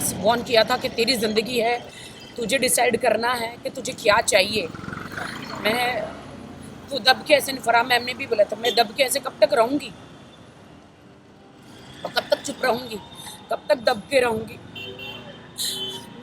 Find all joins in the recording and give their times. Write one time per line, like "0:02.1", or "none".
none